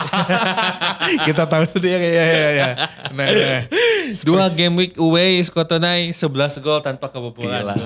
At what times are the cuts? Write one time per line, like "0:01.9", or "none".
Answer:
none

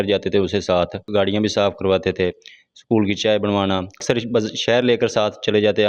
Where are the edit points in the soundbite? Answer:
0:01.0
0:04.0

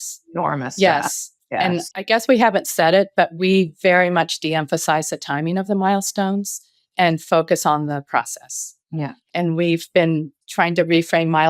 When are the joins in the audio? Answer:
0:09.2
0:10.4

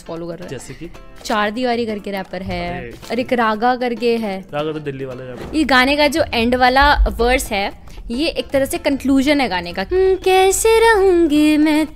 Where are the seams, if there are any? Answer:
0:01.2
0:03.0
0:05.3
0:09.7

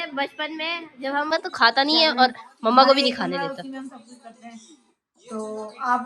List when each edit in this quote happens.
0:01.3

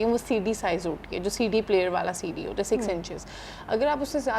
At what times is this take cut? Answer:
none

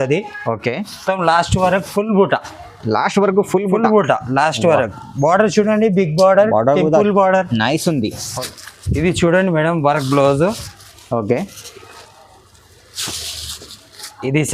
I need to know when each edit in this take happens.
0:08.3

